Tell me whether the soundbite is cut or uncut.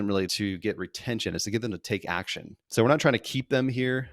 uncut